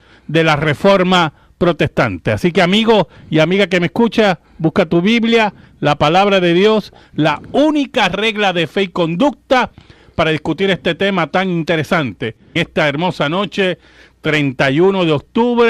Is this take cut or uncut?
cut